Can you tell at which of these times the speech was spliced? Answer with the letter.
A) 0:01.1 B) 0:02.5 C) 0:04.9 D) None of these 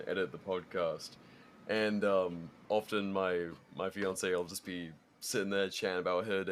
B